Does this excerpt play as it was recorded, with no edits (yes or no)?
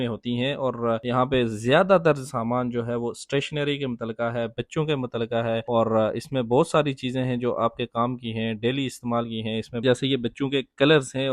no